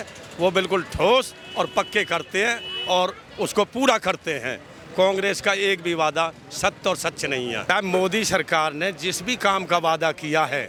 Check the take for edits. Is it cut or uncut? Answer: uncut